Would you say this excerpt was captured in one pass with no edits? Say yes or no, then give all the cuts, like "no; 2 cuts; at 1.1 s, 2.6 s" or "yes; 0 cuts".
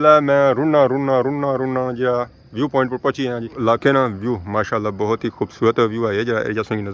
no; 1 cut; at 3.5 s